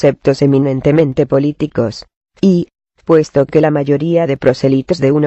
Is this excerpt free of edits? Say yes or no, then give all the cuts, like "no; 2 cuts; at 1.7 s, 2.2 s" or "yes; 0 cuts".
yes; 0 cuts